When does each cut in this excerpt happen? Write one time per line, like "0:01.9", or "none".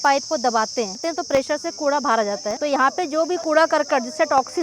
0:01.0
0:02.6

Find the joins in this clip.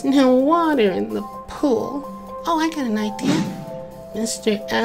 0:03.5

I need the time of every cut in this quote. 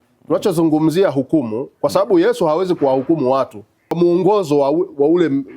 0:03.9

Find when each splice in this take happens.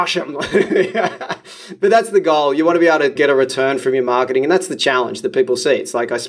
0:01.6
0:03.2

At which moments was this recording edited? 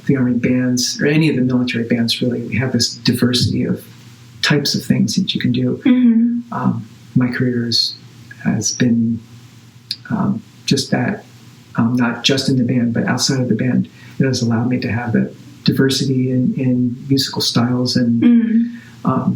none

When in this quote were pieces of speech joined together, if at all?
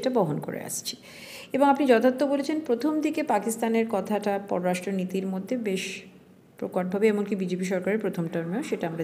none

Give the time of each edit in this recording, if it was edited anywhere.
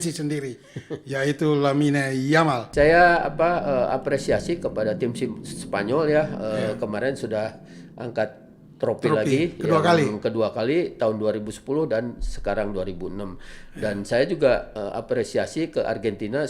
0:02.6

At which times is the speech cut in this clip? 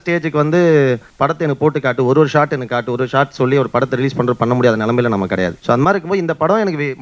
0:01.1
0:05.6

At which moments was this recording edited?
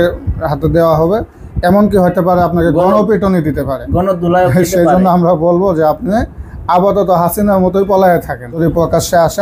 0:08.5

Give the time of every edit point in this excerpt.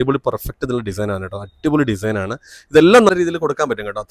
0:03.1

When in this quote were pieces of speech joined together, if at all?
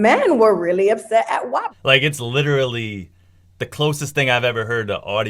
0:01.7

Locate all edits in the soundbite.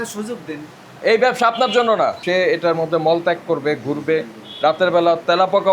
0:02.2

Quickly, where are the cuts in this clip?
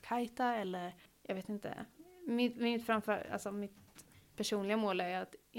0:01.1

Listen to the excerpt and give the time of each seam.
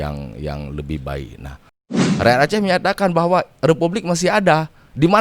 0:02.0

